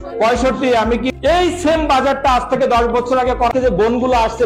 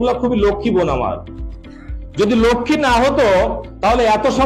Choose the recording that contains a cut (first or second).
first